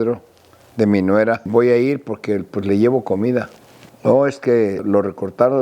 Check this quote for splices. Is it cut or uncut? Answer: cut